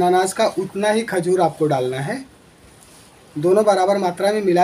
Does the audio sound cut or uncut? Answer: uncut